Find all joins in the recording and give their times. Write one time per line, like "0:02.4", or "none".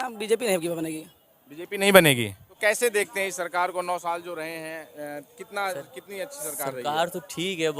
0:02.4

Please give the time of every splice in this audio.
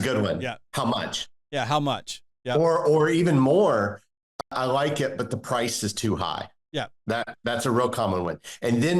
0:04.4

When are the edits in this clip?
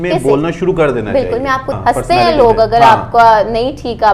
0:01.7

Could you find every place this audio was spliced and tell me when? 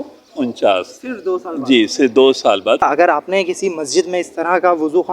0:02.8

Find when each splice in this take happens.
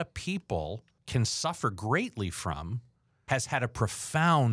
0:00.9
0:03.3

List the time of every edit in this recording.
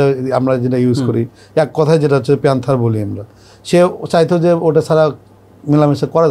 none

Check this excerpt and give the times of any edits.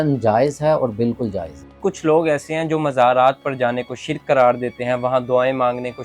0:01.8

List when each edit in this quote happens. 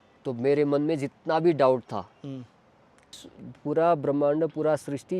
0:03.2

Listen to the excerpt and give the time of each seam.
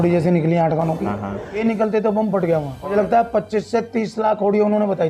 0:01.6
0:02.8

